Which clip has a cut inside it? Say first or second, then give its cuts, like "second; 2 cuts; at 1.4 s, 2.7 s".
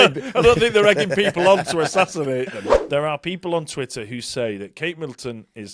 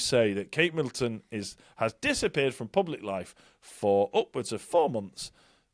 first; 1 cut; at 2.7 s